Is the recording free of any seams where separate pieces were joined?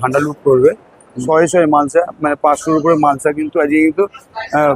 no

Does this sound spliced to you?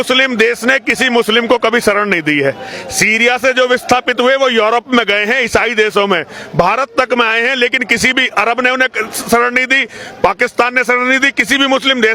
no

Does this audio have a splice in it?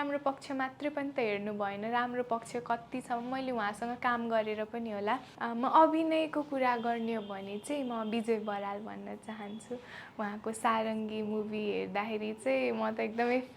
yes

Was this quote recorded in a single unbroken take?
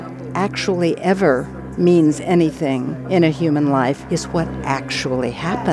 no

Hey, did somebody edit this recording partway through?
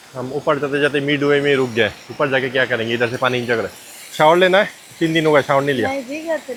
no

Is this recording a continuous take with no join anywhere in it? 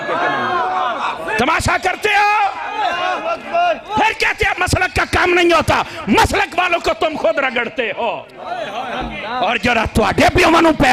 yes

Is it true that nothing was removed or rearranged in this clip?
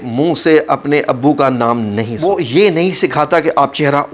no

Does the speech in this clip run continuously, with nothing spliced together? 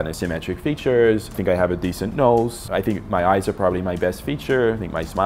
yes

